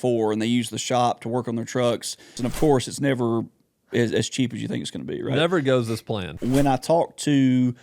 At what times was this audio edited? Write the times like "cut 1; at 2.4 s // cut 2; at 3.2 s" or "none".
cut 1; at 2.3 s // cut 2; at 6.3 s